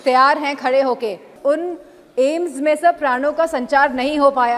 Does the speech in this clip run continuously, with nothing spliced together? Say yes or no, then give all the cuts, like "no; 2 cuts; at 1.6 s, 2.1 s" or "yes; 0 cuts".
no; 1 cut; at 1.3 s